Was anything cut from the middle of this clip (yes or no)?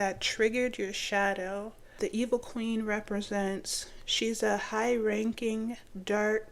yes